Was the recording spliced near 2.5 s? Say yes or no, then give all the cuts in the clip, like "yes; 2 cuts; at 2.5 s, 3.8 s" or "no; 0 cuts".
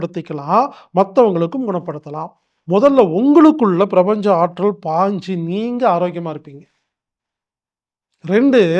yes; 1 cut; at 2.5 s